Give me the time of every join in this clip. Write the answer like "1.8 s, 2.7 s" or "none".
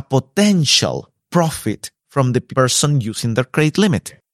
1.1 s